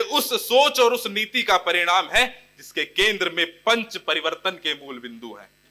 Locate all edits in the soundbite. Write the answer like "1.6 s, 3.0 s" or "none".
none